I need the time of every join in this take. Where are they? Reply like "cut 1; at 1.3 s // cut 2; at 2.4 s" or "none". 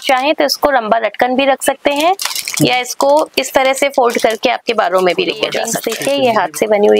cut 1; at 5.8 s